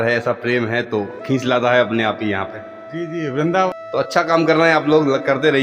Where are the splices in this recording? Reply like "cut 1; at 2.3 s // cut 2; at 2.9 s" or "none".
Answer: cut 1; at 3.7 s